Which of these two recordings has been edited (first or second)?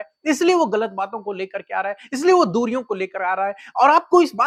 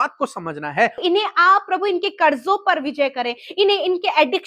second